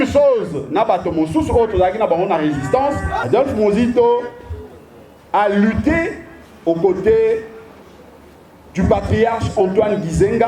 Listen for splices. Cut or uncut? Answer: cut